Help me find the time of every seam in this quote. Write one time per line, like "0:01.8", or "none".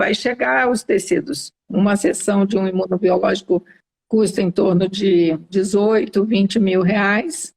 0:01.5